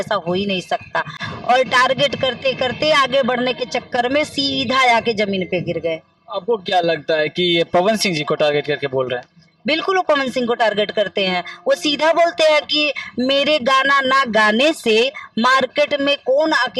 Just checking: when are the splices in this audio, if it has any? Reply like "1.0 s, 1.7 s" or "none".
none